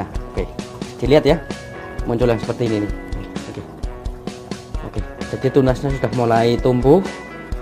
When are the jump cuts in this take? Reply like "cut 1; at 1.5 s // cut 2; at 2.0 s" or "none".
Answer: none

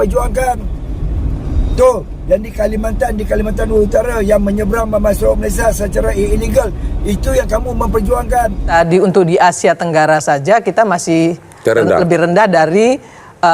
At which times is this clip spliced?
cut 1; at 8.7 s

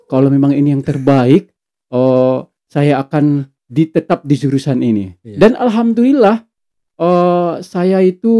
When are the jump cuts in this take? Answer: none

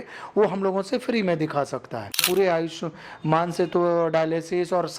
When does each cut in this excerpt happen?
cut 1; at 2.2 s

